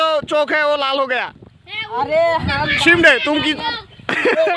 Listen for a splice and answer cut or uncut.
uncut